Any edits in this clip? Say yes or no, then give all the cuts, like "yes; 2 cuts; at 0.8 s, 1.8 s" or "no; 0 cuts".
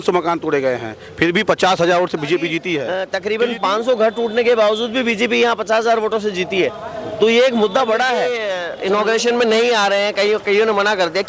yes; 2 cuts; at 2.9 s, 8.4 s